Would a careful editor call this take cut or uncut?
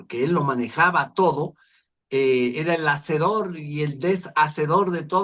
uncut